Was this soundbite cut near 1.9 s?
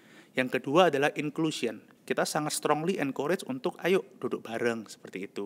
yes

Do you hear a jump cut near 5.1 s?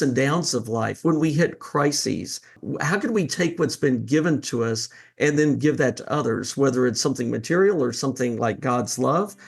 no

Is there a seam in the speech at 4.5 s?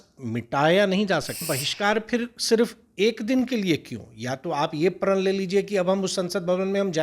no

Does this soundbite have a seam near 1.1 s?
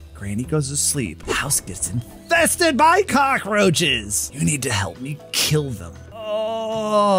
yes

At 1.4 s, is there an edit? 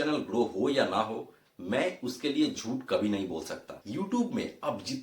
no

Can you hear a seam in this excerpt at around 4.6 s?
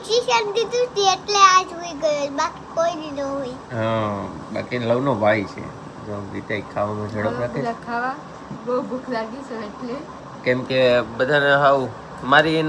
no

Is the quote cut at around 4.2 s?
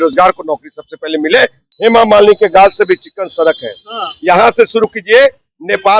no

